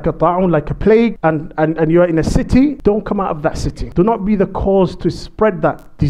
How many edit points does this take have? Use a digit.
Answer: 2